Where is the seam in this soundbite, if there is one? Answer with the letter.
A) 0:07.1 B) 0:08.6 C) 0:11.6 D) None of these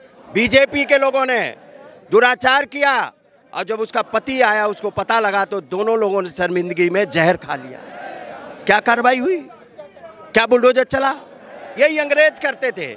C